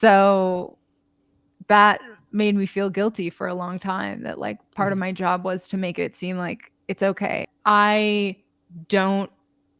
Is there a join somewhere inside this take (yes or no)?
yes